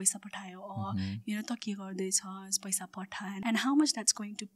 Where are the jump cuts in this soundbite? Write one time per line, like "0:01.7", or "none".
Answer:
0:03.4